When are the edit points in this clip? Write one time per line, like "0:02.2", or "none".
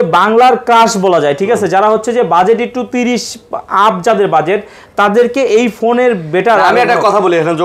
none